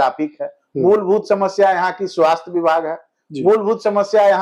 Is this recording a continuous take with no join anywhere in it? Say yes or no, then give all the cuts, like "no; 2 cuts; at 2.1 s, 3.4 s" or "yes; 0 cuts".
yes; 0 cuts